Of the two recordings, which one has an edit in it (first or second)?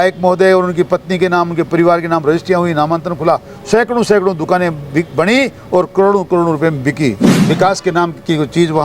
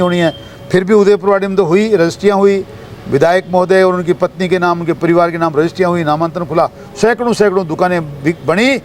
first